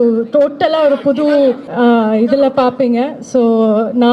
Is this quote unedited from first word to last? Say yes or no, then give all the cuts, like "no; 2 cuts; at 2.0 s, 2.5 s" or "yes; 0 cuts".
no; 1 cut; at 1.7 s